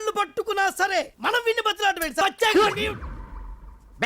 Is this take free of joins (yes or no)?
no